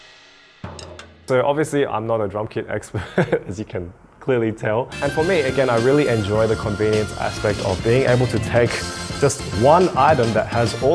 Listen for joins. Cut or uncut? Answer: cut